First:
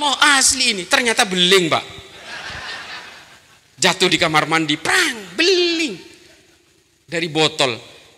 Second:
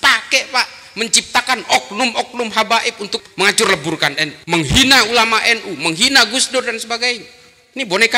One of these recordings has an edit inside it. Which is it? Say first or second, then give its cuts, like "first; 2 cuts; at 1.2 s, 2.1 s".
second; 2 cuts; at 3.2 s, 4.3 s